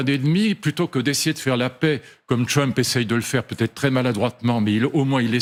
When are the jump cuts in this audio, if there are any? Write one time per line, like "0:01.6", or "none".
none